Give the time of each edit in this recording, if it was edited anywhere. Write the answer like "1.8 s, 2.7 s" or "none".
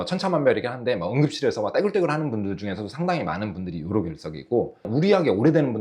none

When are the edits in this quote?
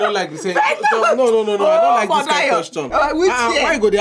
none

